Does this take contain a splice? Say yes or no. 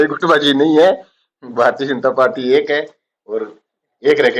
no